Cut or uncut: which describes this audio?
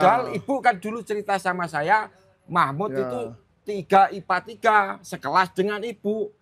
uncut